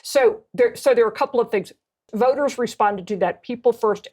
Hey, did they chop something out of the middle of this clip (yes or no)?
yes